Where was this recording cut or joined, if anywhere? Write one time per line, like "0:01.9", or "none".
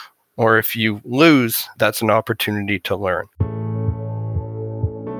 0:01.7
0:03.3

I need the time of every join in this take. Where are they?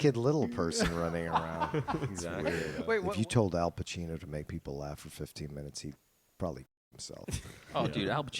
0:02.7

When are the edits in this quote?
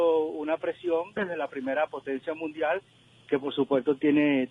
0:01.8

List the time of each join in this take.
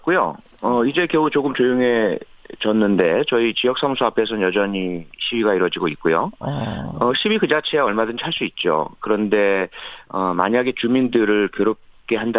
0:10.6

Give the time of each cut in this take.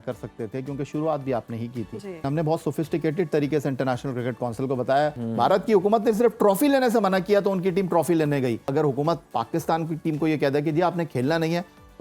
0:02.2
0:05.2
0:08.7

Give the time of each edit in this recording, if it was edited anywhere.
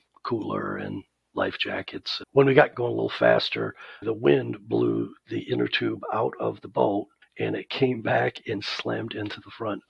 0:02.2
0:02.7
0:04.0

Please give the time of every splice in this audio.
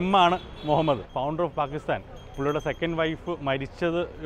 0:01.1

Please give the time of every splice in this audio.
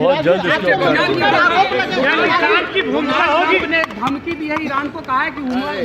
none

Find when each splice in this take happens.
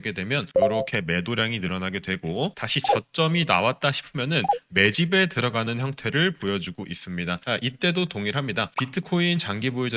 0:07.4

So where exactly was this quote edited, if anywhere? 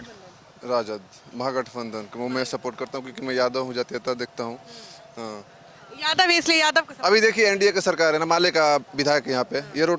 none

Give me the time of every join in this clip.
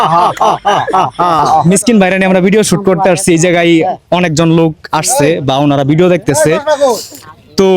0:01.6

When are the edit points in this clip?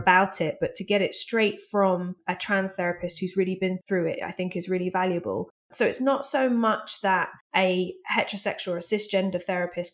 0:02.2
0:03.8
0:05.7
0:07.4

